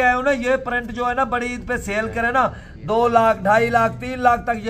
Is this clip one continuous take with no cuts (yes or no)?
yes